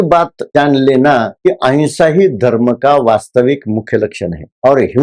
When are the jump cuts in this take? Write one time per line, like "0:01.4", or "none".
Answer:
0:01.3